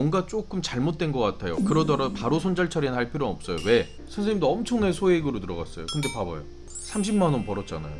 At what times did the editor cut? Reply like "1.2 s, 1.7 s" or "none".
4.0 s, 6.9 s